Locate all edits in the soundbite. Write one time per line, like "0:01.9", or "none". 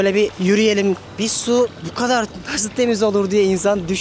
0:01.4